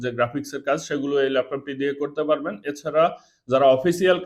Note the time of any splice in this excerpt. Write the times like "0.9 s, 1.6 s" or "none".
none

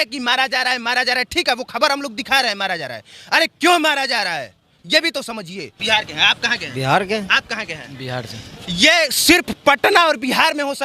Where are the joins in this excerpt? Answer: 5.7 s

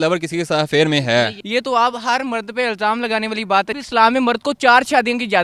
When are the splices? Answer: 1.4 s, 3.7 s

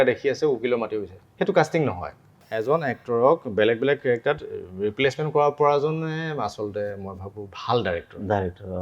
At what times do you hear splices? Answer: 2.5 s

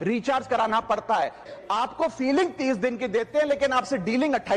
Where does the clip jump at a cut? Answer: 1.4 s

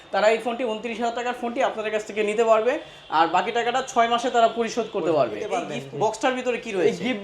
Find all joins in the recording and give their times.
5.8 s

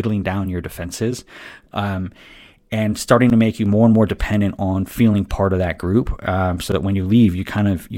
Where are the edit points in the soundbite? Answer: none

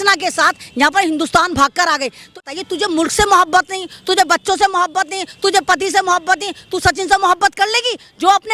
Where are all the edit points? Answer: 2.4 s

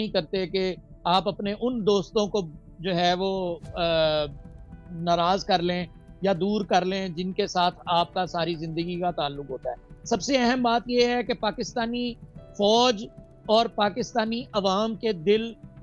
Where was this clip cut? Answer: 9.9 s

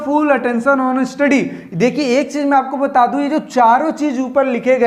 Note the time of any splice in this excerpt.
none

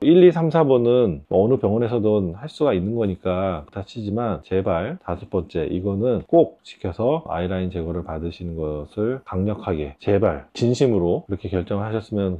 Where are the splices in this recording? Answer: 1.2 s, 7.3 s

